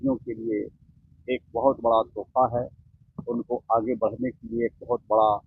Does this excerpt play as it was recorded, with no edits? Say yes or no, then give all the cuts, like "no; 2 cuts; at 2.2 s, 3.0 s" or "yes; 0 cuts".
yes; 0 cuts